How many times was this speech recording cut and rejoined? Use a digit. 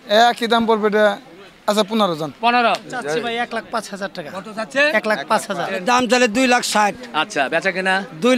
2